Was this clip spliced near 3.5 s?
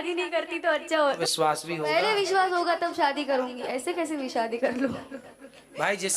no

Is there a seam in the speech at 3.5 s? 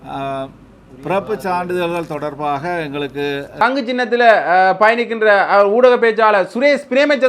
yes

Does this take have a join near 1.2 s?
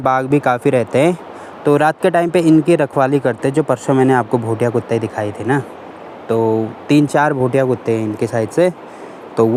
no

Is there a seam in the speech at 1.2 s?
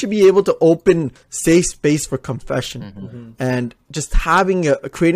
yes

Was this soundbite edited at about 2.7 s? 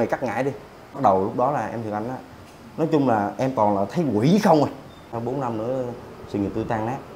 no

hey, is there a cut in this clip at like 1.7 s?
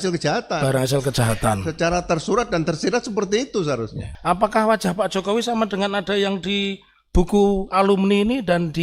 no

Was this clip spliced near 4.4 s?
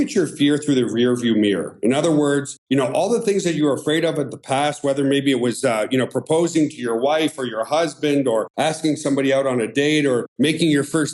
no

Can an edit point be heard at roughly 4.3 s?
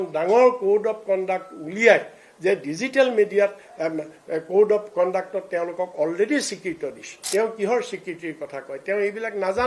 no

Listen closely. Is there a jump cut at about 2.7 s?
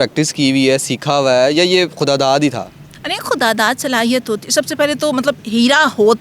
no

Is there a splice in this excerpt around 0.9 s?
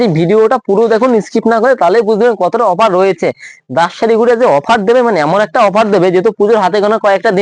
no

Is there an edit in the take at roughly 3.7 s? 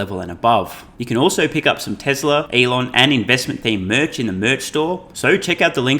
no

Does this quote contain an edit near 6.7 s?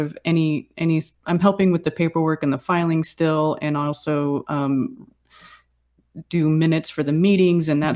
no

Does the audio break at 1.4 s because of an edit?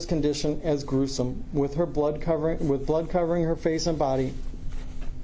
no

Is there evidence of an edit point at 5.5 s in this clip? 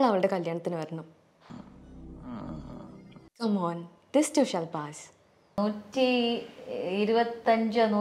yes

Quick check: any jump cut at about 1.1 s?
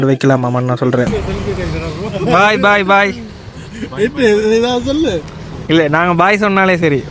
yes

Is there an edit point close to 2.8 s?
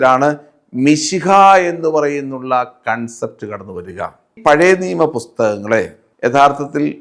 no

